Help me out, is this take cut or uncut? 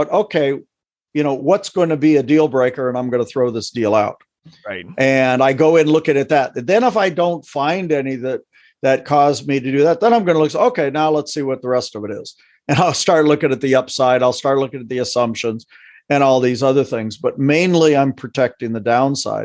uncut